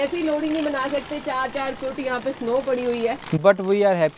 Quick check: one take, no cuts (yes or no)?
yes